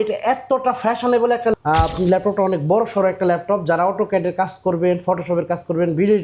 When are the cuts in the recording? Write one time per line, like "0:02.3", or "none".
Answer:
0:01.5